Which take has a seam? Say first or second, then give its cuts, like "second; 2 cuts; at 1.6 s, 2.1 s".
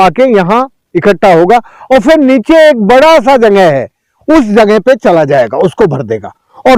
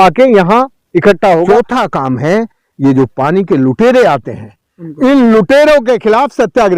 second; 1 cut; at 1.4 s